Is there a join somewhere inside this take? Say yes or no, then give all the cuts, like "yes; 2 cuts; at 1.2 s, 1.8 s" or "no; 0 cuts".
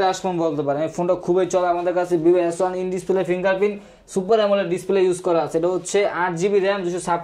no; 0 cuts